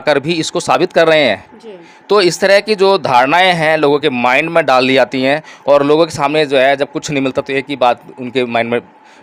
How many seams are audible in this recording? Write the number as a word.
zero